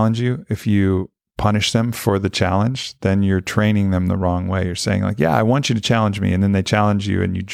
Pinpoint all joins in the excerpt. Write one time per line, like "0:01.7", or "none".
none